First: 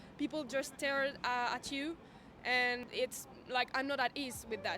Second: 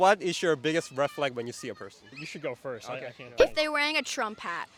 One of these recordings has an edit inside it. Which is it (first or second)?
first